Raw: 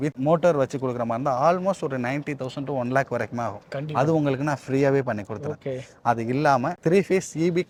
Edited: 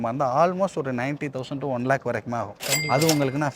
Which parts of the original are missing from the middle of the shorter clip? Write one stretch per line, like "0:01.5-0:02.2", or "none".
none